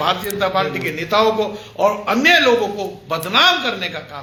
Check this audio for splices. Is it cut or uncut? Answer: uncut